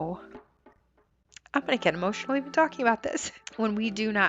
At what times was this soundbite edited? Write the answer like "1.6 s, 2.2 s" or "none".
3.4 s